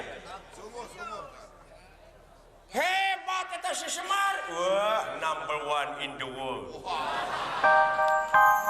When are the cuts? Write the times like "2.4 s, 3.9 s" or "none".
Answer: 7.6 s